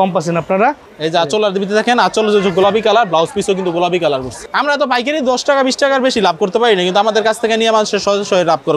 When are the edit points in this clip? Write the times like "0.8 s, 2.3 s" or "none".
0.9 s, 4.4 s